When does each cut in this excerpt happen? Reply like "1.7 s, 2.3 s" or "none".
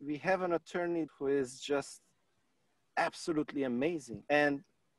1.1 s, 4.2 s